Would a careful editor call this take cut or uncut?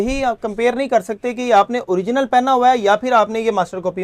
uncut